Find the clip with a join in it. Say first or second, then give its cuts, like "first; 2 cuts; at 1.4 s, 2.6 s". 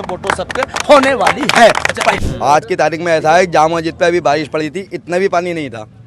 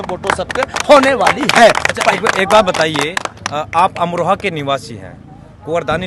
first; 1 cut; at 2.2 s